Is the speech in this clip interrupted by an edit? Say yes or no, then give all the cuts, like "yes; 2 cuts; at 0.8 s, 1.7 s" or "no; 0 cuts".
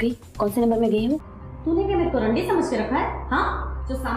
yes; 1 cut; at 1.3 s